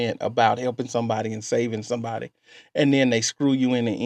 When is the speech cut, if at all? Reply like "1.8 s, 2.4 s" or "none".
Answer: none